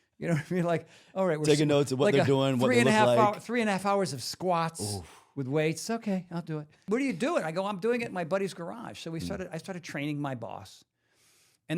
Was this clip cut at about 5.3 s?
no; 1 cut; at 6.9 s

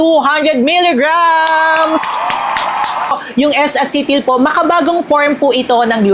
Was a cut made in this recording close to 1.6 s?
no; 1 cut; at 3.1 s

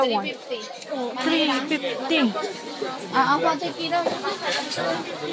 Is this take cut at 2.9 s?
no; 0 cuts

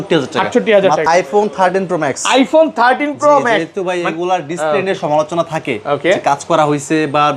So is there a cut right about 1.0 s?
yes; 1 cut; at 1.0 s

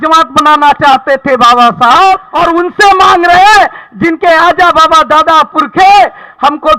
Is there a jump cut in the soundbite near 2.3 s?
yes; 1 cut; at 2.3 s

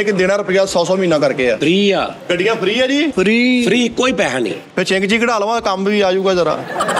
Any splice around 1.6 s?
yes; 3 cuts; at 1.6 s, 2.2 s, 3.1 s

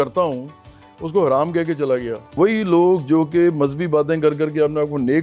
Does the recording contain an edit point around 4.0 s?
no; 1 cut; at 2.3 s

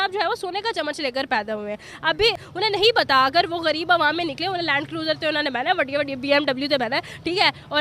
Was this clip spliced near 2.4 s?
yes; 1 cut; at 2.4 s

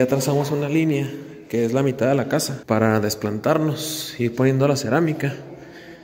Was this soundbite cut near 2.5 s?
yes; 1 cut; at 2.5 s

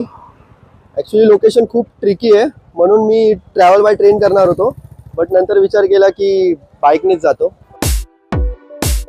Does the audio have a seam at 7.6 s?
yes; 1 cut; at 7.6 s

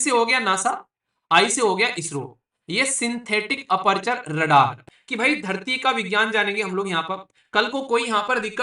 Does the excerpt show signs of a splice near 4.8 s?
yes; 1 cut; at 4.8 s

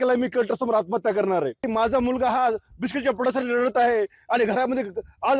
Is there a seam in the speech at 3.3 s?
no; 1 cut; at 1.7 s

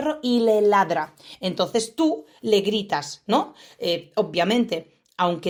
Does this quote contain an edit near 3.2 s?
no; 0 cuts

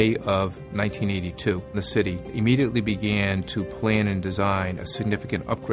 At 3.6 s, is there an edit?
no; 1 cut; at 1.9 s

